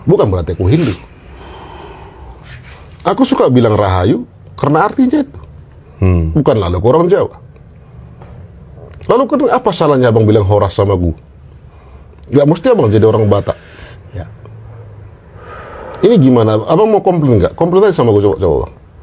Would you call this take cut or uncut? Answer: cut